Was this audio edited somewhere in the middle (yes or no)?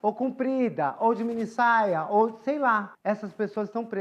yes